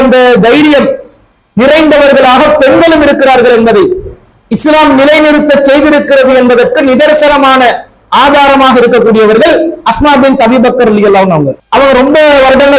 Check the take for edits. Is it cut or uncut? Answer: cut